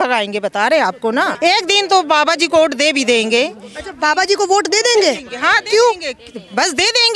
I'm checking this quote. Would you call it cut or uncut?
cut